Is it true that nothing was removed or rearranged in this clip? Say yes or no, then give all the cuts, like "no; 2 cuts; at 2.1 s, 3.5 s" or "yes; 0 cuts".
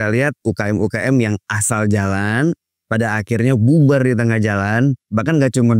yes; 0 cuts